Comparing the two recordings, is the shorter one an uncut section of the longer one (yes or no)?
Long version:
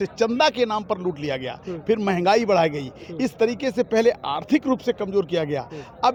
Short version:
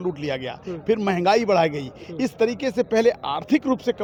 yes